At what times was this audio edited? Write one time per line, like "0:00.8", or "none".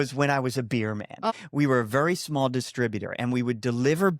0:01.3